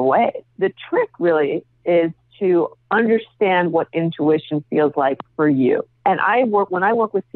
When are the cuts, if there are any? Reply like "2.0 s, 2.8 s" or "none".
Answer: none